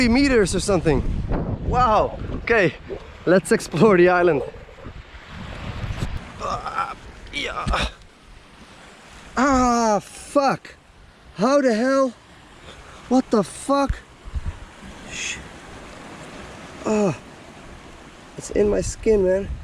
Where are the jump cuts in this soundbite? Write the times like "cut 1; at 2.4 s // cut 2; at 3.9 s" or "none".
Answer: cut 1; at 6.2 s